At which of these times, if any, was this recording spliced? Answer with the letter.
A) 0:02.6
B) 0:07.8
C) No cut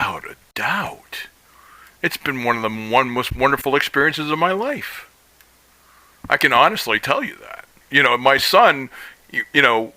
B